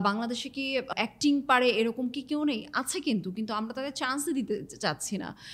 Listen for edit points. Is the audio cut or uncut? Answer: cut